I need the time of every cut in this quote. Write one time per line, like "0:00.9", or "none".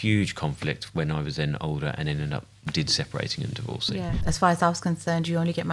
0:04.2